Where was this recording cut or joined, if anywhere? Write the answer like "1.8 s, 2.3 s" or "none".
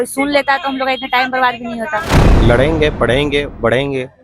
2.2 s